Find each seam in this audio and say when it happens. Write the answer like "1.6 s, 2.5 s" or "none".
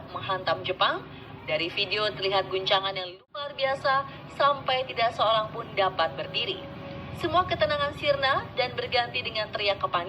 3.1 s